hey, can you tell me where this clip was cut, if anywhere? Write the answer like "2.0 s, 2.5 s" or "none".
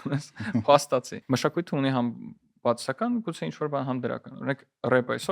1.2 s